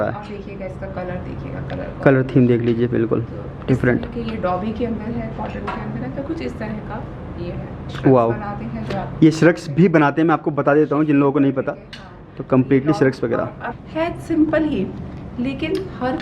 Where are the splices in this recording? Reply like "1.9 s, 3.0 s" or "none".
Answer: 7.9 s, 13.7 s